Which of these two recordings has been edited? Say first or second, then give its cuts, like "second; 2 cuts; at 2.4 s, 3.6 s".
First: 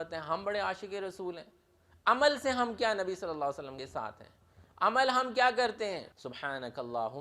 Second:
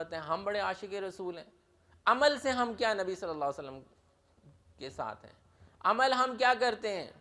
first; 2 cuts; at 3.7 s, 6.1 s